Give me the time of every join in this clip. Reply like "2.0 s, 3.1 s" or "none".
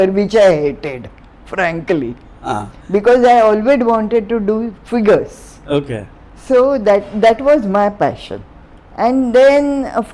none